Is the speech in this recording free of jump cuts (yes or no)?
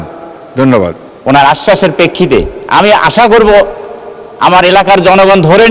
no